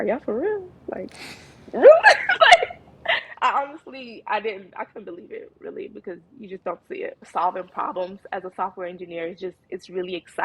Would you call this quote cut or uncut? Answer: cut